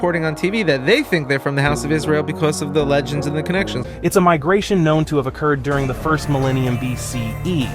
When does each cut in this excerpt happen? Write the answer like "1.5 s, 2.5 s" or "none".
3.8 s